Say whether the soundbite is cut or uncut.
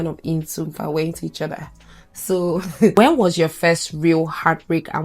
cut